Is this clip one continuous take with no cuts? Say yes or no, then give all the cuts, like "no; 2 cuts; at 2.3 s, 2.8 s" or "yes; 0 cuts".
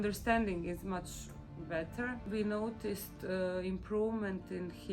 no; 1 cut; at 2.2 s